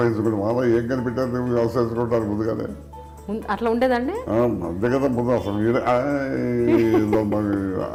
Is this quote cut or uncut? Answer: uncut